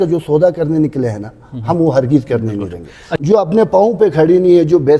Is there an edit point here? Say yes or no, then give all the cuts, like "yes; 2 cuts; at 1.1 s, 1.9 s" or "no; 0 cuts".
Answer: yes; 1 cut; at 3.2 s